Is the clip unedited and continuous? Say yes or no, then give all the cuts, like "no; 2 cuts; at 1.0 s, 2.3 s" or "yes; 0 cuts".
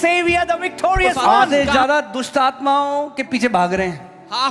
no; 1 cut; at 1.5 s